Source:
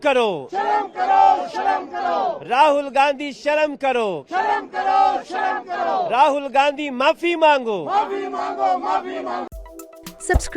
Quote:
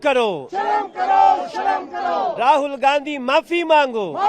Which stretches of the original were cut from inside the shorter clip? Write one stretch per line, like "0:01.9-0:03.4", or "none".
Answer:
0:02.4-0:06.1